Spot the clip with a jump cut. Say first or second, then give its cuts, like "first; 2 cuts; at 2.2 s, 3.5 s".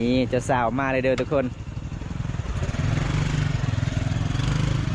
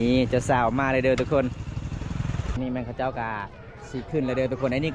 second; 1 cut; at 2.5 s